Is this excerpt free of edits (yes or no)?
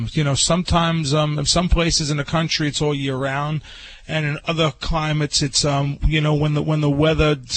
yes